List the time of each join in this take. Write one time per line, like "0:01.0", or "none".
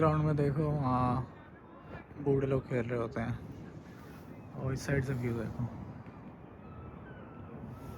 none